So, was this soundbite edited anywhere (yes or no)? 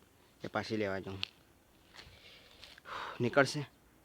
no